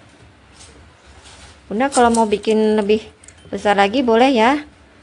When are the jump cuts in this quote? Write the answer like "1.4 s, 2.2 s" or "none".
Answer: 1.5 s